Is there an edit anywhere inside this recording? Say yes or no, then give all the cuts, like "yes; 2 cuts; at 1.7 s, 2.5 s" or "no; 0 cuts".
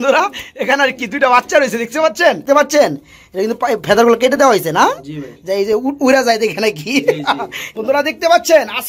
yes; 2 cuts; at 2.4 s, 7.6 s